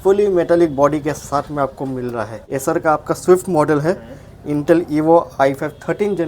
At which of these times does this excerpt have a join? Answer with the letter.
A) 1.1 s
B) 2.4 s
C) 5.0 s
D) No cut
B